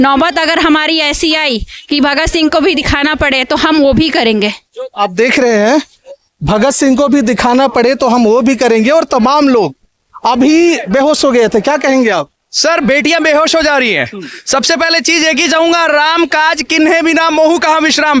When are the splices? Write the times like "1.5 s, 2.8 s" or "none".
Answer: none